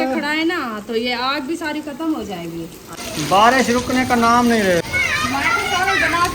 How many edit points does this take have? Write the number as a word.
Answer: two